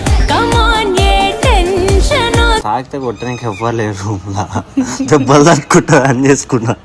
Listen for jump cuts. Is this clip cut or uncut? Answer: cut